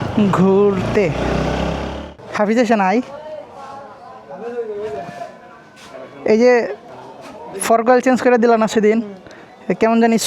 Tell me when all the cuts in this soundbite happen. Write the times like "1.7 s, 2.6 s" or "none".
2.1 s

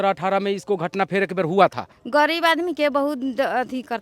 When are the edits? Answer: 1.9 s

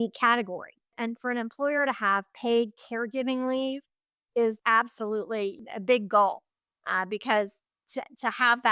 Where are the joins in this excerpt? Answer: 0.9 s, 4.6 s, 5.6 s

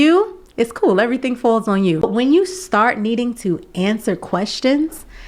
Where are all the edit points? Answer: 2.0 s

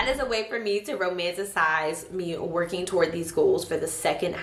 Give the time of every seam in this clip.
none

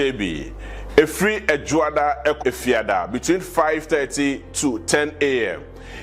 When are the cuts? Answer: 2.4 s

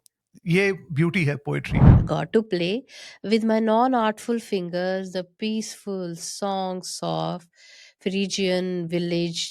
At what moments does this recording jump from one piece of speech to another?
1.8 s

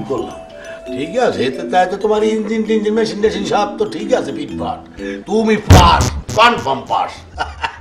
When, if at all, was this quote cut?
none

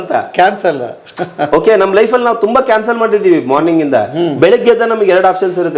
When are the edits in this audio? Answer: none

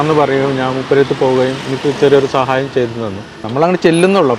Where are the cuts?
3.4 s

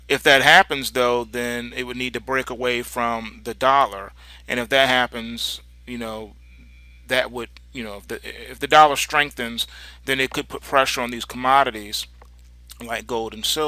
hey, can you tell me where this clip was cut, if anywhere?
none

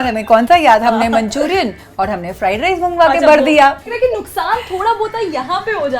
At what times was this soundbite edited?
3.8 s

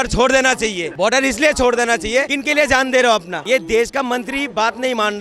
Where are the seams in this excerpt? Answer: 0.8 s, 2.4 s, 3.3 s

